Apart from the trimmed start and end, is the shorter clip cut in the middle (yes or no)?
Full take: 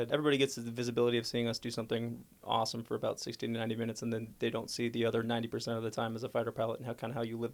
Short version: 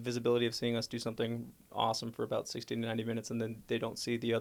no